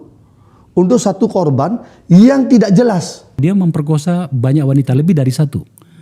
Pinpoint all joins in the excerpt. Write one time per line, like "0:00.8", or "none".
0:03.3